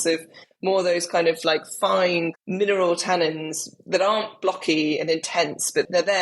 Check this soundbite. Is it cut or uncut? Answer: cut